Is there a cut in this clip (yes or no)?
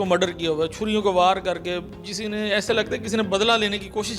no